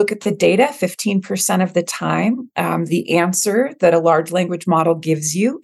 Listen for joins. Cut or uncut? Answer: uncut